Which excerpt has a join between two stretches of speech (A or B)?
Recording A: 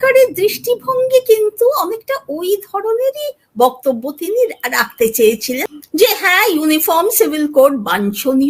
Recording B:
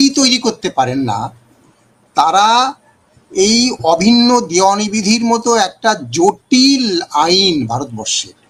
A